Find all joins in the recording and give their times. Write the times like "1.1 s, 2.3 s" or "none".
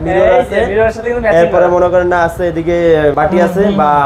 3.1 s